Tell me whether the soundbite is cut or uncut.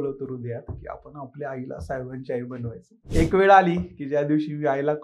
cut